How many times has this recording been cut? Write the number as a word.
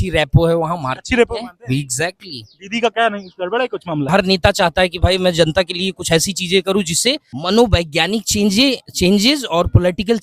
two